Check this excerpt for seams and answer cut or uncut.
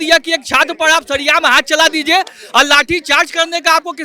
uncut